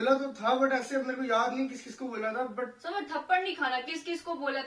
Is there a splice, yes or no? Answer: yes